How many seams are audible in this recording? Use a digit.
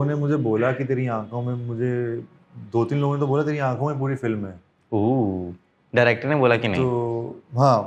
0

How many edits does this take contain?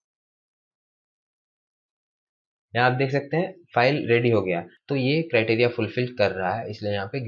1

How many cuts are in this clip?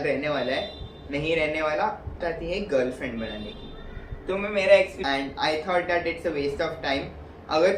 2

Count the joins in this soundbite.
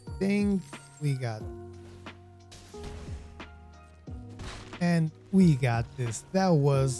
3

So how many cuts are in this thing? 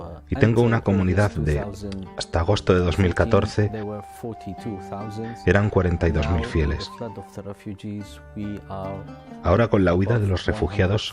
1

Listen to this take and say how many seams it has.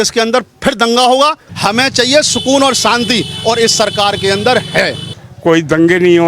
2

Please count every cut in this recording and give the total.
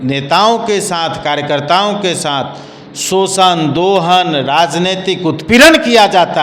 0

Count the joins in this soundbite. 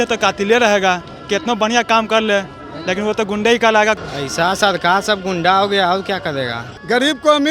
2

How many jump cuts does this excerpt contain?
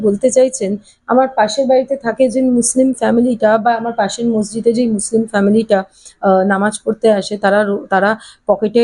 0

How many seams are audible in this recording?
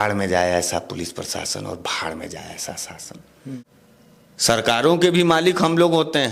1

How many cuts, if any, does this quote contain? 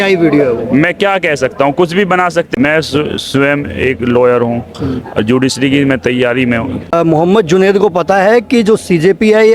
2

